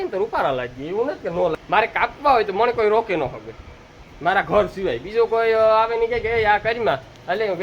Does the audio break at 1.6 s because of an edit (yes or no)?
yes